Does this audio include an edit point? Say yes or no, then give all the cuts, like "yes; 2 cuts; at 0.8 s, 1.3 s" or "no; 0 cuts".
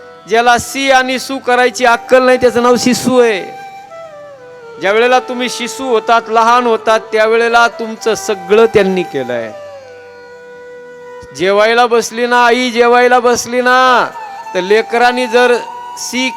yes; 2 cuts; at 9.5 s, 11.2 s